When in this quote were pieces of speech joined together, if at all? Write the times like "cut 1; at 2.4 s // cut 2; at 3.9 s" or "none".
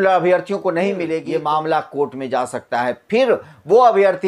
cut 1; at 1.2 s